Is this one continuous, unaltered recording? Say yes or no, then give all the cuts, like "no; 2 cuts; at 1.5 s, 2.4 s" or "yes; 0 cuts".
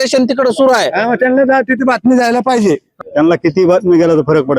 no; 1 cut; at 3.0 s